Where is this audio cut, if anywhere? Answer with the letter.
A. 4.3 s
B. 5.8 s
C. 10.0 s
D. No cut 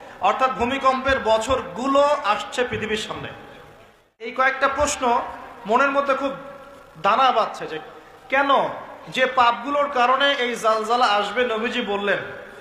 A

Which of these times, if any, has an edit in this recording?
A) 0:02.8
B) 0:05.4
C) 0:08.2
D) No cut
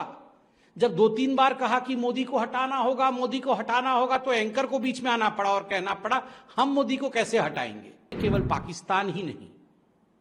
C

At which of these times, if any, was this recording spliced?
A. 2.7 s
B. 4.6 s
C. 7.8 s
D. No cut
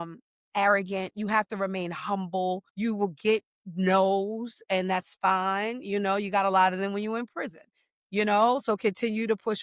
A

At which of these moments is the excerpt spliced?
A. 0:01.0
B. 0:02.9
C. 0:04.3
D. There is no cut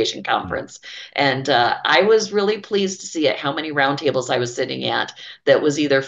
D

